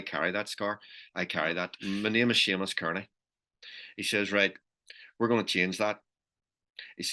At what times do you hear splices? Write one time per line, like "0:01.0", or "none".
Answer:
0:01.8